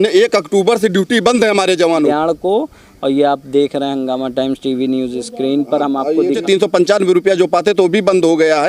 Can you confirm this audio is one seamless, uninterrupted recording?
no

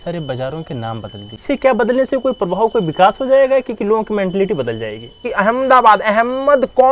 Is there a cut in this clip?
yes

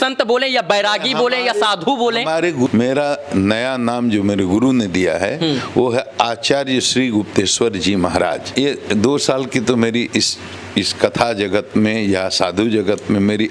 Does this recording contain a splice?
yes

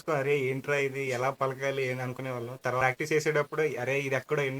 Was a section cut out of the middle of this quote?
yes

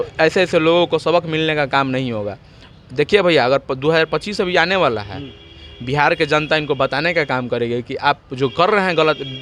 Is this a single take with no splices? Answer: yes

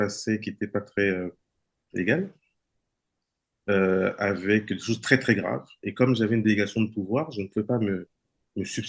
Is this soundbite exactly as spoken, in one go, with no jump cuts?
yes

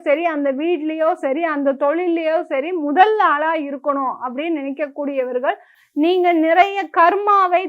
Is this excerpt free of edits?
no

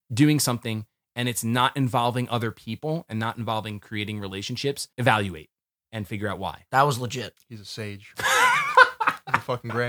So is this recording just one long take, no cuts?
no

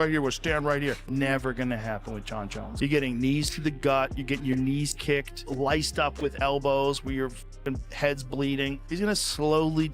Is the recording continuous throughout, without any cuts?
no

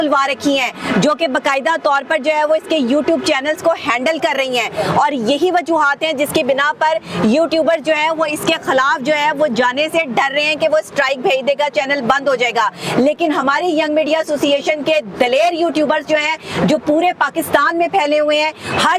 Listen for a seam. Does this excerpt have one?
no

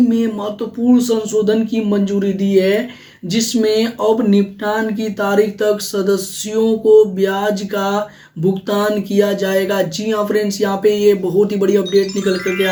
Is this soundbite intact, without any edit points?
yes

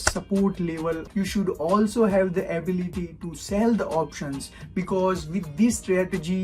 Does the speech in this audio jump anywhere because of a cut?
yes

